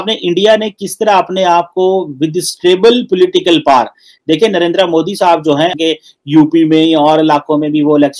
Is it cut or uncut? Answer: uncut